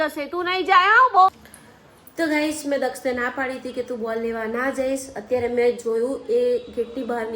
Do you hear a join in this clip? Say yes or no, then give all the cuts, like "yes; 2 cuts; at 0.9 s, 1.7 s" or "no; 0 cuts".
yes; 1 cut; at 1.3 s